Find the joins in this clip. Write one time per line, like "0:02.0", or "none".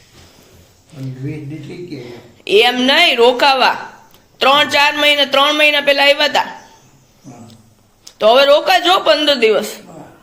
none